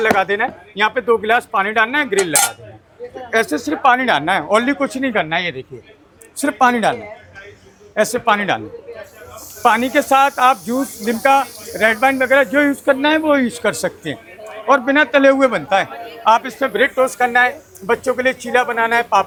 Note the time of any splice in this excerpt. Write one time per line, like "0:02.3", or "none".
none